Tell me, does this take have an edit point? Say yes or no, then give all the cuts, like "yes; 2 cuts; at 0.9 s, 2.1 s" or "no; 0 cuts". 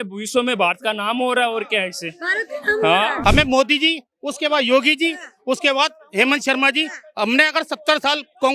yes; 1 cut; at 3.2 s